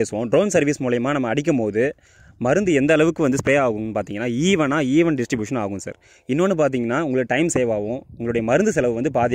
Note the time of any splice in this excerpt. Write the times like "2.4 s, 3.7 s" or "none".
none